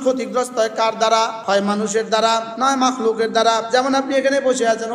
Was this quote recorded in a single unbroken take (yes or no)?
no